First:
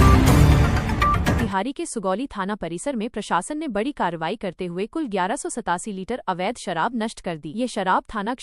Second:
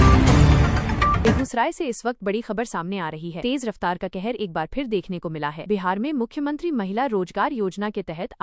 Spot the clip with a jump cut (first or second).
first